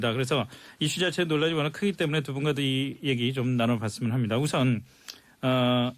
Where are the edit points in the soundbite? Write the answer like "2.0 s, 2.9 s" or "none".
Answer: 4.5 s